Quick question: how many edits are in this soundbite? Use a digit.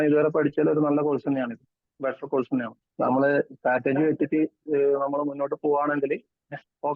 1